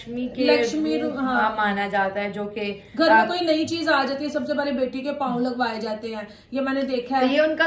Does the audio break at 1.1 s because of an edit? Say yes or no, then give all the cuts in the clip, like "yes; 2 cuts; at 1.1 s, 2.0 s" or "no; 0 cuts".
no; 0 cuts